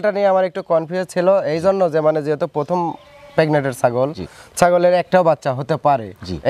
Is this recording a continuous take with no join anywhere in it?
yes; 0 cuts

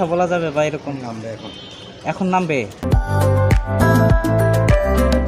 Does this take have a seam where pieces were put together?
yes; 2 cuts; at 2.9 s, 4.1 s

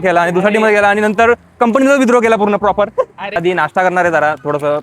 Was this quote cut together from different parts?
yes; 1 cut; at 3.4 s

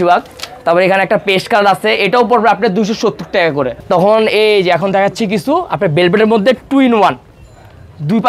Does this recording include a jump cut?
yes; 1 cut; at 3.7 s

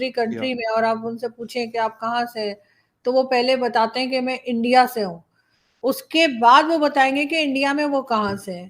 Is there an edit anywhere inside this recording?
no; 0 cuts

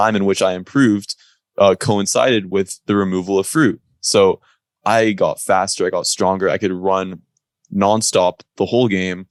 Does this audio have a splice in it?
no; 0 cuts

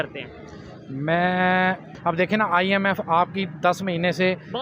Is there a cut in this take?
yes; 1 cut; at 1.9 s

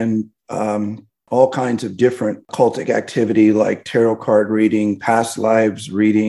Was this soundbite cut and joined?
yes; 1 cut; at 2.4 s

